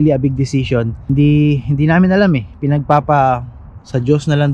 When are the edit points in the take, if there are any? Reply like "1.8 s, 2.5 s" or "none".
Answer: none